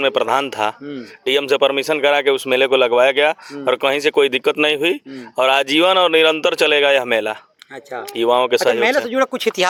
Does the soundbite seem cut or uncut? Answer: uncut